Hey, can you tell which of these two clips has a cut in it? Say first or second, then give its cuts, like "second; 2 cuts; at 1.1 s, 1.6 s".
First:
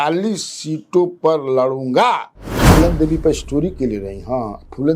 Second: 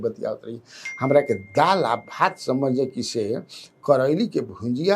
first; 1 cut; at 2.7 s